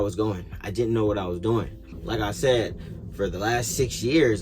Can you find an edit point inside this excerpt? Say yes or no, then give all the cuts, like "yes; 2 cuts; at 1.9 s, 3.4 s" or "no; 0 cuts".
yes; 1 cut; at 1.9 s